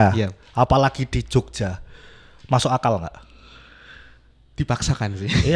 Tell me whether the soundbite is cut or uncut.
uncut